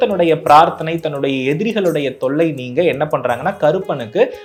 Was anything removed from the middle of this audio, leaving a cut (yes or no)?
no